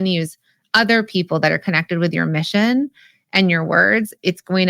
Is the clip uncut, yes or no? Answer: yes